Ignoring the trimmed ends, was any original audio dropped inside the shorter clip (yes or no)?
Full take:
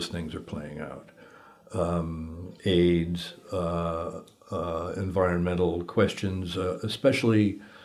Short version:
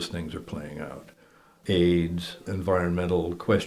yes